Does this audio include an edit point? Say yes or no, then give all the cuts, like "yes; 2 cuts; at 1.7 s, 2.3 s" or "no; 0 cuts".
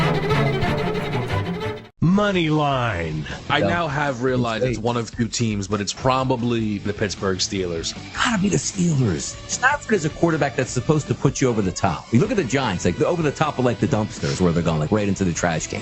yes; 1 cut; at 1.7 s